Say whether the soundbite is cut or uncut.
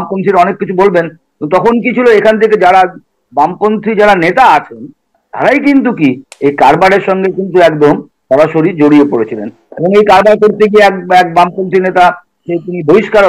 uncut